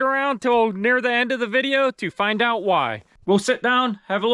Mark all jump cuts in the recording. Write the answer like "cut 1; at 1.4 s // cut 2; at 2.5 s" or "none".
cut 1; at 3.1 s